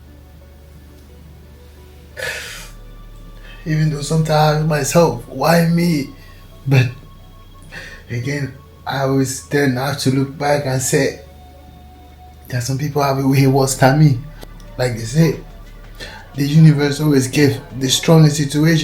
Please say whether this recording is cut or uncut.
cut